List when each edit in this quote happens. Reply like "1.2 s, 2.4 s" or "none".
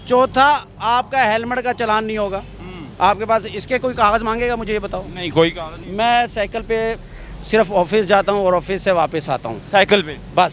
5.8 s